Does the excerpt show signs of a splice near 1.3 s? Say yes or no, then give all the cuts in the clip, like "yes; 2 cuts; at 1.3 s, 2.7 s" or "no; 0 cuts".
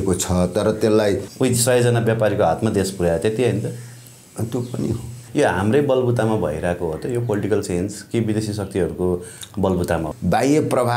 yes; 3 cuts; at 1.3 s, 5.2 s, 10.1 s